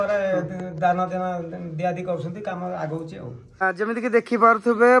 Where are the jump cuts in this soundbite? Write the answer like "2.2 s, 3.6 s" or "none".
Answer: 3.4 s